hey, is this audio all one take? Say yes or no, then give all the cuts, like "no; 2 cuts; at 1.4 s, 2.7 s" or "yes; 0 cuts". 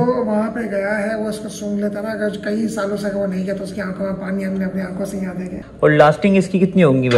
no; 1 cut; at 5.5 s